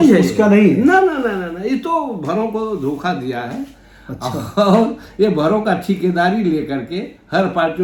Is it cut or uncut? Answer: uncut